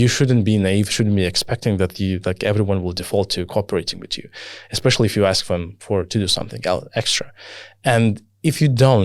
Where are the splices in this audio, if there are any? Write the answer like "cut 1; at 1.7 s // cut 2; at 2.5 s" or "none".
none